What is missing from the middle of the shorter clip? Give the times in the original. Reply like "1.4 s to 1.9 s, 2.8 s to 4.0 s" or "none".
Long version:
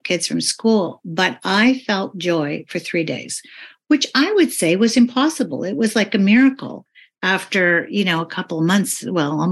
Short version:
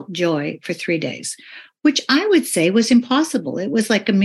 none

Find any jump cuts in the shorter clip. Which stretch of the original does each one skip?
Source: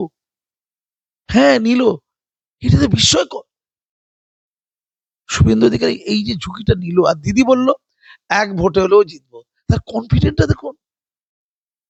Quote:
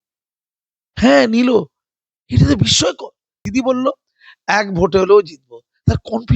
3.7 s to 7.2 s

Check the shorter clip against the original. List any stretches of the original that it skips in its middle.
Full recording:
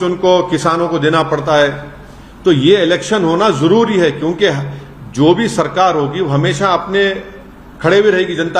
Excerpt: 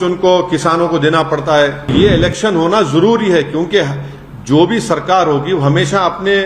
1.9 s to 2.6 s

